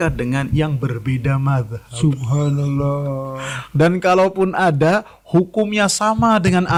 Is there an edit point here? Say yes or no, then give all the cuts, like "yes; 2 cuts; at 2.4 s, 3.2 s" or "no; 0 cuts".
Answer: no; 0 cuts